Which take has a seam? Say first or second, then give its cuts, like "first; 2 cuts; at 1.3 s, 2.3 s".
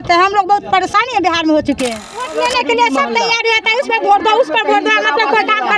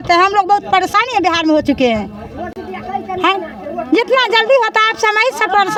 first; 1 cut; at 2.3 s